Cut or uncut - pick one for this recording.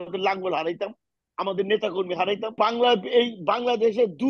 cut